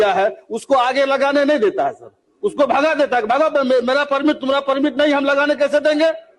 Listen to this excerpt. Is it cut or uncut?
uncut